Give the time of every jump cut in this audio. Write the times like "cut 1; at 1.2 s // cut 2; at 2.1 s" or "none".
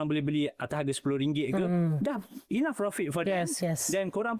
none